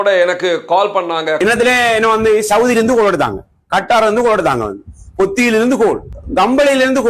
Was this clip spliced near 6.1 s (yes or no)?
yes